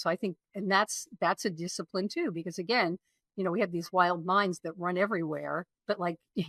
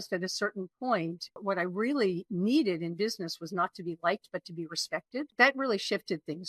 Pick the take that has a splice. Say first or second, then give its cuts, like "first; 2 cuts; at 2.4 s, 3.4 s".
second; 2 cuts; at 1.4 s, 5.3 s